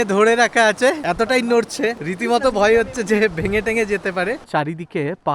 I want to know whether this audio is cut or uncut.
cut